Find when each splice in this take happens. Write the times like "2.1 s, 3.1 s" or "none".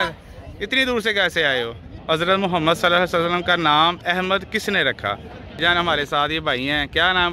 2.0 s, 5.6 s